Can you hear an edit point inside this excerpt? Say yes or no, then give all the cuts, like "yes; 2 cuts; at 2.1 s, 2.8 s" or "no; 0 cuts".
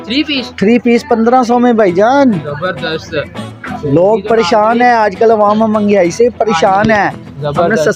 no; 0 cuts